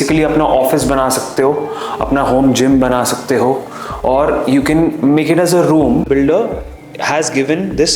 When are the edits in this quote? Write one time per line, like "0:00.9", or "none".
0:06.1